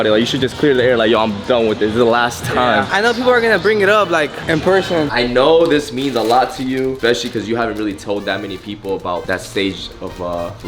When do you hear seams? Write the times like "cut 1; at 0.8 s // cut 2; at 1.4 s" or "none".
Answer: cut 1; at 5.1 s // cut 2; at 7.0 s